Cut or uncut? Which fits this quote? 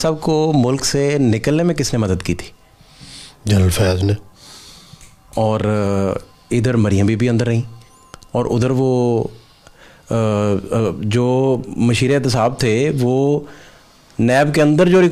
uncut